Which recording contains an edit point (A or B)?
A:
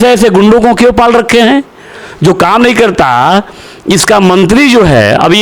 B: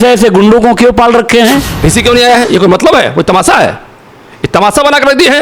B